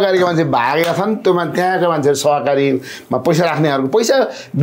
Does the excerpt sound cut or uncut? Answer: uncut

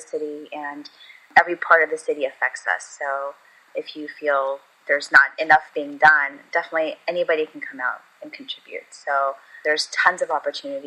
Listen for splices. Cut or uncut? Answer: cut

